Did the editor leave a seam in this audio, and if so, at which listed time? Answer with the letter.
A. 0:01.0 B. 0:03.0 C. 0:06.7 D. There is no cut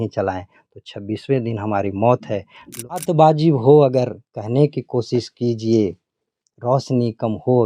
B